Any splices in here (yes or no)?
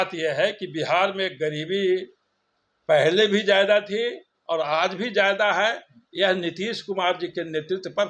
no